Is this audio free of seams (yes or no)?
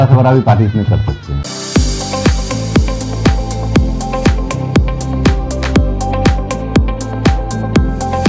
no